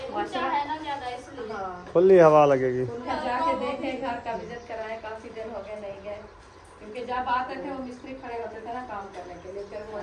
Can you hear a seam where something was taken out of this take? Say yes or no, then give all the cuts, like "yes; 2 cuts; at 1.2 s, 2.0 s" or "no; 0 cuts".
yes; 1 cut; at 3.1 s